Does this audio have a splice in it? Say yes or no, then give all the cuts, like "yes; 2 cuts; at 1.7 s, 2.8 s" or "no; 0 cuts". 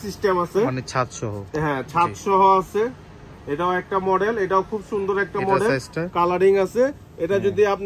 no; 0 cuts